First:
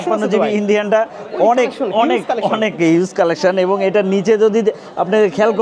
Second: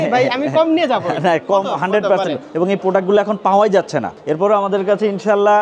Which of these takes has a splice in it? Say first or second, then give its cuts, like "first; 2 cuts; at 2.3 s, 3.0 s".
second; 2 cuts; at 2.5 s, 4.2 s